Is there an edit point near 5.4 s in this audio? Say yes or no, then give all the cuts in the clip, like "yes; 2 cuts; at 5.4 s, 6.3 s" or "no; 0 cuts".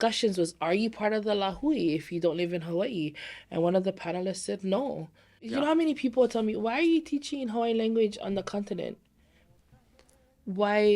yes; 1 cut; at 5.4 s